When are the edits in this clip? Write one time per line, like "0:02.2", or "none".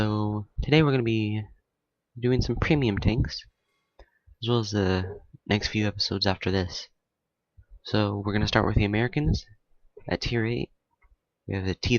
0:08.4